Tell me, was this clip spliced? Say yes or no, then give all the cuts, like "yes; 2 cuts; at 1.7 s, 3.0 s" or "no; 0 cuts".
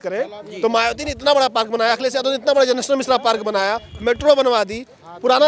no; 0 cuts